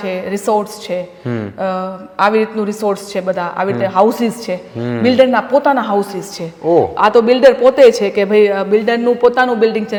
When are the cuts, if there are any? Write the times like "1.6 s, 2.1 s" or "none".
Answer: none